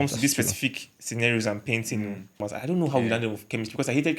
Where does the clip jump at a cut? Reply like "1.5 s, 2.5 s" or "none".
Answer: 2.4 s